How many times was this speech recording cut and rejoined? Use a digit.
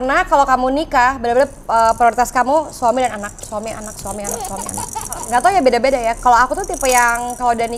0